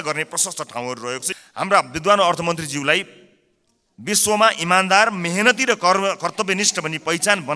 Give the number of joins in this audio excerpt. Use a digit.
1